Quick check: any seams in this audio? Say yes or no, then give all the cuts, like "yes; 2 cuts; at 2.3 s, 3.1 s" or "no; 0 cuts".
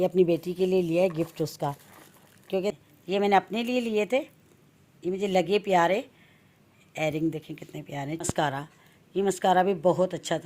yes; 2 cuts; at 2.7 s, 8.2 s